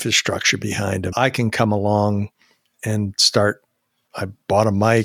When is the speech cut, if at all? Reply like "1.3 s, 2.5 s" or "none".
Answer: 1.1 s

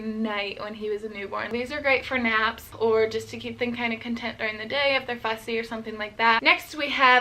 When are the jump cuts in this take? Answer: 1.5 s, 2.7 s, 6.4 s

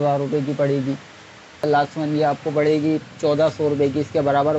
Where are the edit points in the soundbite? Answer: 1.6 s

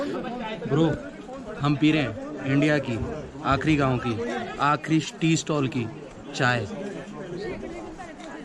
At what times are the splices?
none

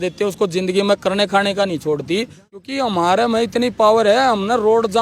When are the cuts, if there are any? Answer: 2.7 s

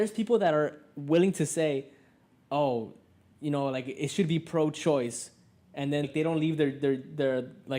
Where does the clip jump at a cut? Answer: 6.1 s

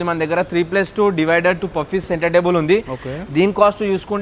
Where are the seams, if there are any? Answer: none

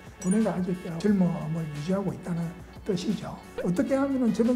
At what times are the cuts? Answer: 3.4 s

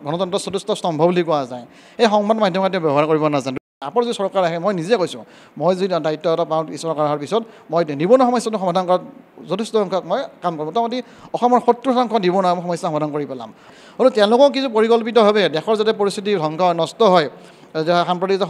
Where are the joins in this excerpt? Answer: 3.6 s, 13.6 s

